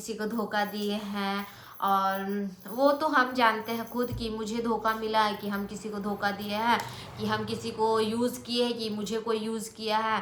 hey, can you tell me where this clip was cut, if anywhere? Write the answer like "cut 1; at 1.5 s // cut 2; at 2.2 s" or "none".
none